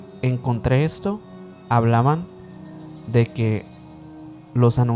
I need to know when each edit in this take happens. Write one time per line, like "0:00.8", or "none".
none